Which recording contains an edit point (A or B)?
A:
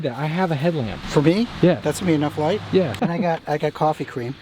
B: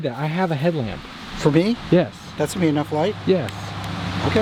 A